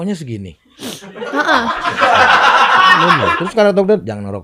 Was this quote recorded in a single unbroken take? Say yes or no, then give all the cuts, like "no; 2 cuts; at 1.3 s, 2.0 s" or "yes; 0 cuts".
no; 1 cut; at 3.4 s